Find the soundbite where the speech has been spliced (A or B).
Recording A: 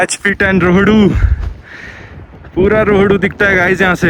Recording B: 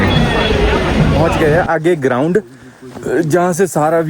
B